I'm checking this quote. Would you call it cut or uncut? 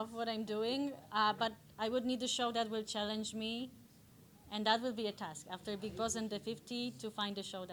uncut